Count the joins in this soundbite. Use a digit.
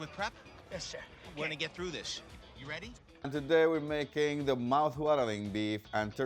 1